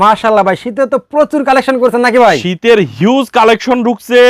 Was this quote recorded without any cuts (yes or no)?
yes